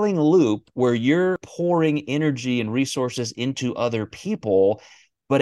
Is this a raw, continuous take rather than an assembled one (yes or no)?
no